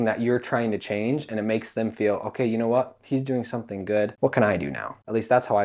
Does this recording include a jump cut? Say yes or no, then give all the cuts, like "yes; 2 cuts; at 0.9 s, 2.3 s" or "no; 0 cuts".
yes; 1 cut; at 4.5 s